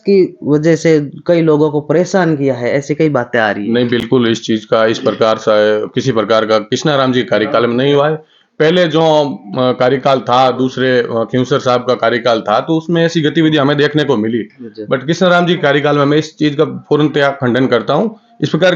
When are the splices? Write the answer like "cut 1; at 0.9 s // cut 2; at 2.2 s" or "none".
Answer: none